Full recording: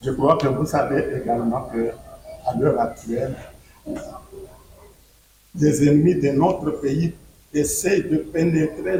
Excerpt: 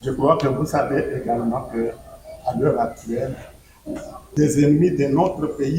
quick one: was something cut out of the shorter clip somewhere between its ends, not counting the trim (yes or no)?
yes